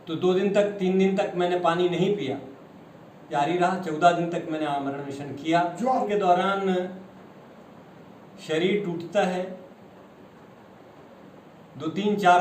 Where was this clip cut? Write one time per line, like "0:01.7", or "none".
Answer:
0:03.3
0:06.1